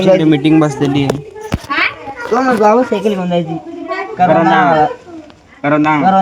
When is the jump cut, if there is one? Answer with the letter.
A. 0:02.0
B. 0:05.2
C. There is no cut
C